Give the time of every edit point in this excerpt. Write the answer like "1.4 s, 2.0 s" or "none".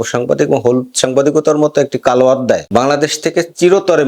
2.6 s